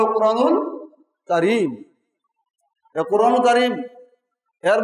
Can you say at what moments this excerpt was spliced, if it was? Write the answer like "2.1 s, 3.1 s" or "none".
none